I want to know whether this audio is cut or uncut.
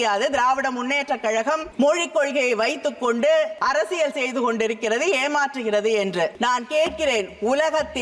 cut